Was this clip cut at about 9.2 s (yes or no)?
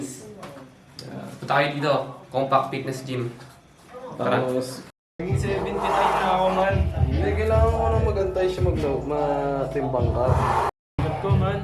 no